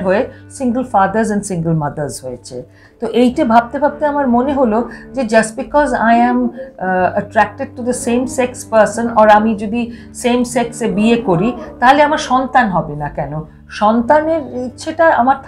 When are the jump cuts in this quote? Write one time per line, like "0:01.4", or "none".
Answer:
none